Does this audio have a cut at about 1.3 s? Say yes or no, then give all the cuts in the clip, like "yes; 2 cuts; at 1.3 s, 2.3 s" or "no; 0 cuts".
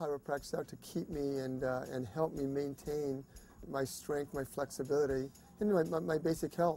no; 1 cut; at 3.6 s